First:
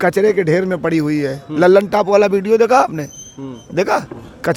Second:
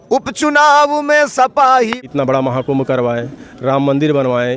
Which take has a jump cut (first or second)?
second